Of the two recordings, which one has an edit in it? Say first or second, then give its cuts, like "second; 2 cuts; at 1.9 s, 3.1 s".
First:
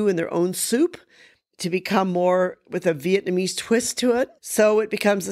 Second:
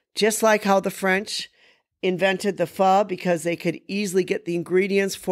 first; 1 cut; at 4.4 s